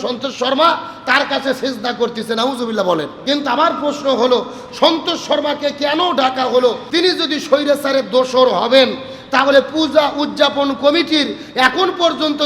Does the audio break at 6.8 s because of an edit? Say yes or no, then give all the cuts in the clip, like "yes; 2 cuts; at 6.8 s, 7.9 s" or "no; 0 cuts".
yes; 2 cuts; at 3.1 s, 6.8 s